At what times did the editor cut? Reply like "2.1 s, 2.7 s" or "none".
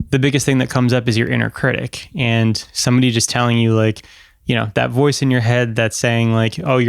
none